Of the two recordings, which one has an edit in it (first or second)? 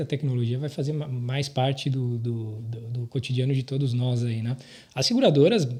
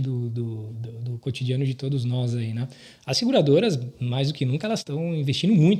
second